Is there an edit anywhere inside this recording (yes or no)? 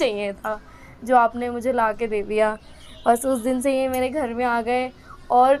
no